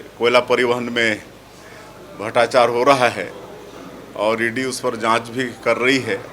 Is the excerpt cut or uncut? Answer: uncut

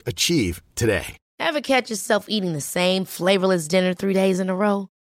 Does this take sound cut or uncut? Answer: cut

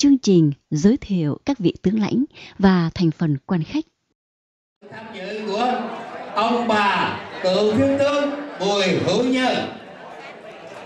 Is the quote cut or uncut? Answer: cut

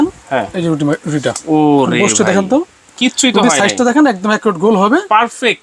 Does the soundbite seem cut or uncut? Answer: uncut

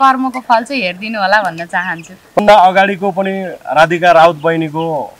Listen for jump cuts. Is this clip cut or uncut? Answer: cut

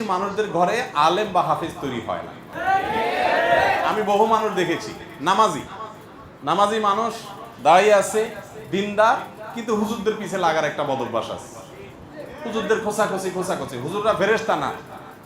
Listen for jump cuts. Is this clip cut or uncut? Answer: uncut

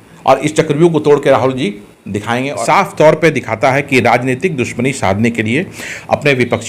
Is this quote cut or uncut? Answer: cut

